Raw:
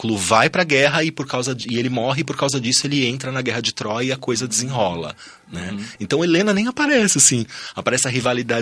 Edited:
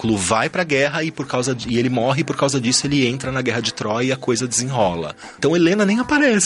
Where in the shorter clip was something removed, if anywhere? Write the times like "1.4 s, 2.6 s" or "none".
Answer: 5.3 s